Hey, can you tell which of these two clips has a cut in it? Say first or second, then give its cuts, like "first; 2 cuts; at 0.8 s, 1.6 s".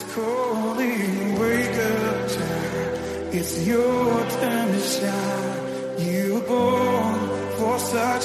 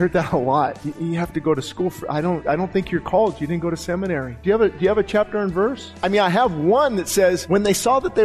second; 5 cuts; at 0.8 s, 2.4 s, 4.3 s, 5.9 s, 7.4 s